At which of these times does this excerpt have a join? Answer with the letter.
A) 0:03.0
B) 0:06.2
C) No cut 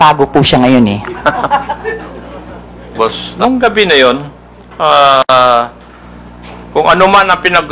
A